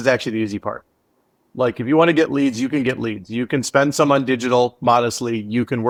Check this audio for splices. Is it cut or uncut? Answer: uncut